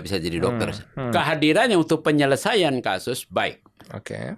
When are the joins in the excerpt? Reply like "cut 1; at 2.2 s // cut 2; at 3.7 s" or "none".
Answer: cut 1; at 1.1 s